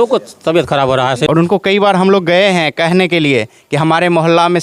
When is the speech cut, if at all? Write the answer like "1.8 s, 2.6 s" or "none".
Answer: 1.2 s